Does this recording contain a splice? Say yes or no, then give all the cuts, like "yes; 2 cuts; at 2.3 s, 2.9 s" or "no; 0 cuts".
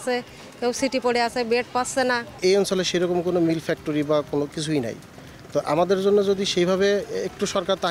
yes; 1 cut; at 2.3 s